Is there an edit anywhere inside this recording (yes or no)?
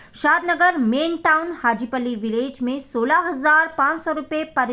no